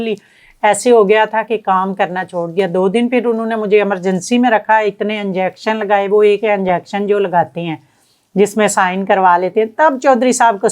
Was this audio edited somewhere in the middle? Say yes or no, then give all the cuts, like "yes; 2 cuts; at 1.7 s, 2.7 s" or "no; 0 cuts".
no; 0 cuts